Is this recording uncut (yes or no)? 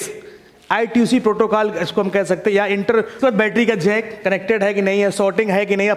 no